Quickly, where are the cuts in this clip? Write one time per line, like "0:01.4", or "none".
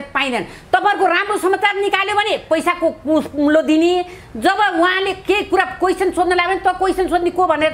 none

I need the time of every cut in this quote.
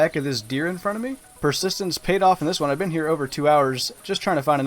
0:01.2

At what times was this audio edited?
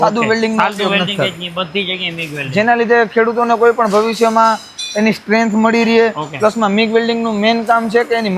none

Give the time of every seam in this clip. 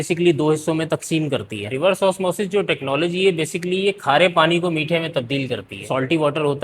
0:01.6
0:05.9

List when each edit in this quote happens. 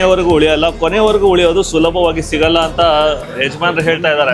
none

